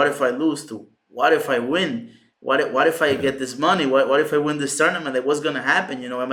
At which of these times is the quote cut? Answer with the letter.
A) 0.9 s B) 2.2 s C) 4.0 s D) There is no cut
D